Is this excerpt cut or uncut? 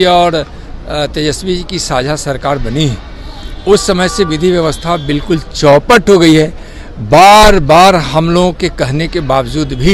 uncut